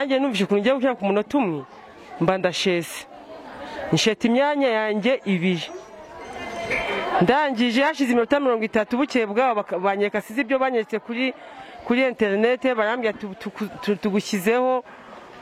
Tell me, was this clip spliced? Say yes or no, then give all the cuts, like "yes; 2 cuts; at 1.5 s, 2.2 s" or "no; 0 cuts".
no; 0 cuts